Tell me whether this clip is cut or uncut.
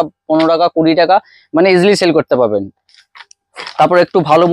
uncut